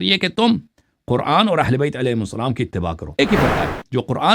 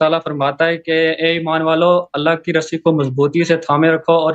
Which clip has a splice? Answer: first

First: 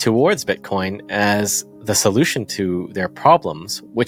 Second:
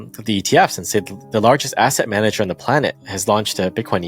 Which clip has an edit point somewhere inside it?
second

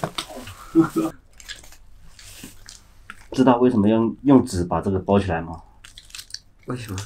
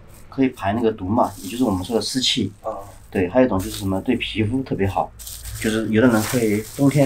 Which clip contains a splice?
first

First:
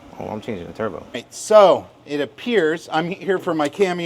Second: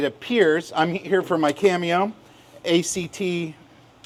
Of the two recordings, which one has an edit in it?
first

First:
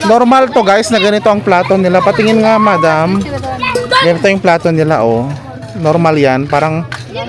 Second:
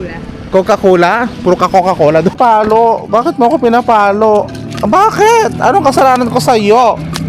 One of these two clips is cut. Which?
second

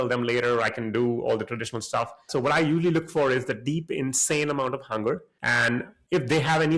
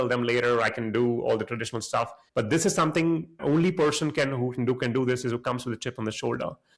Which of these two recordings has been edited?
first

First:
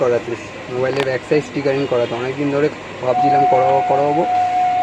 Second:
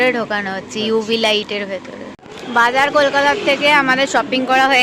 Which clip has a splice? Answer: second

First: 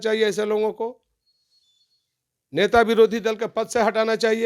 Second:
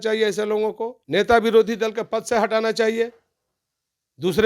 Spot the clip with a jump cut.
second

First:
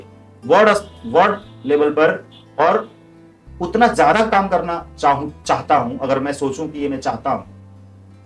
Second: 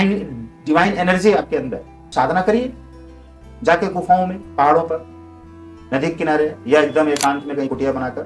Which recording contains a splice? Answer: second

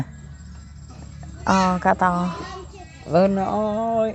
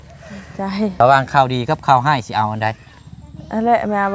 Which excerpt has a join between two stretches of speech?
second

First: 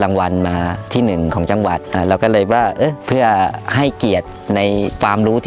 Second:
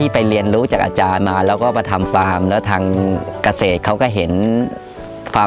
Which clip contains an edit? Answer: first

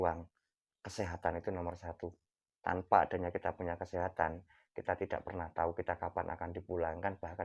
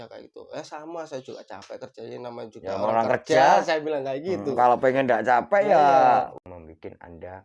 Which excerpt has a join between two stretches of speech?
second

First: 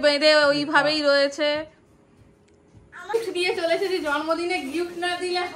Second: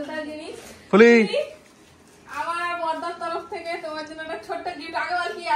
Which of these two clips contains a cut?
first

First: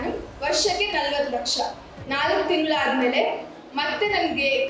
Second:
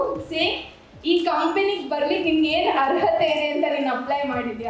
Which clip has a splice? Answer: first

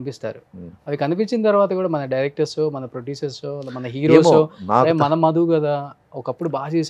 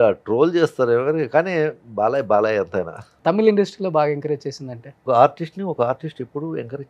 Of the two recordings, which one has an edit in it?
second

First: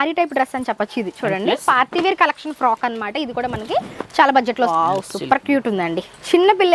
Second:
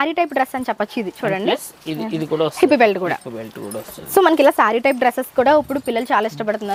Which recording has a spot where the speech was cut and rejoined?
first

